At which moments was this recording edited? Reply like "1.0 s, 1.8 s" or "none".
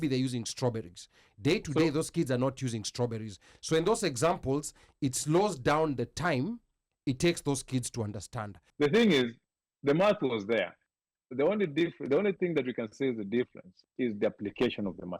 8.6 s